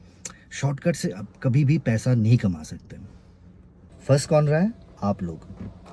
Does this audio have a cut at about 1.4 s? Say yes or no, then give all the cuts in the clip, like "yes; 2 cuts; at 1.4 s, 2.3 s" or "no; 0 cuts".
no; 1 cut; at 4.0 s